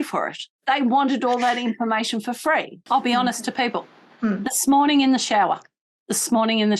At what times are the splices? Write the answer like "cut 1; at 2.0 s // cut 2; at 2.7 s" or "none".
cut 1; at 2.8 s